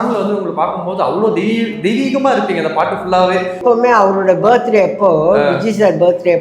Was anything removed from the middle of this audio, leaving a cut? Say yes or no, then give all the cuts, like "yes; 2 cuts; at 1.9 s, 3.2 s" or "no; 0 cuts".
yes; 1 cut; at 3.6 s